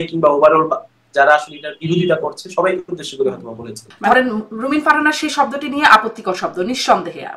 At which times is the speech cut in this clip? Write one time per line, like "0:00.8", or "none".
0:03.9